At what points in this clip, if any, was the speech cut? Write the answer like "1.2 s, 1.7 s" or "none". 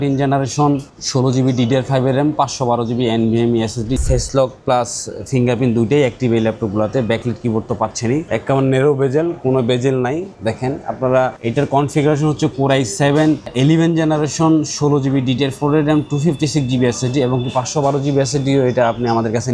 4.0 s, 8.3 s